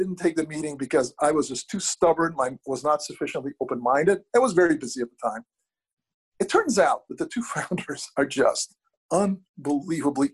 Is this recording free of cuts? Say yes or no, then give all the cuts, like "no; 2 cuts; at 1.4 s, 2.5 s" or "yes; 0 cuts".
no; 1 cut; at 9.0 s